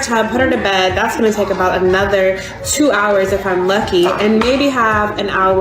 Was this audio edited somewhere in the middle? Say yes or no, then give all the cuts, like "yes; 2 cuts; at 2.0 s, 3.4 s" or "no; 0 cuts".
no; 0 cuts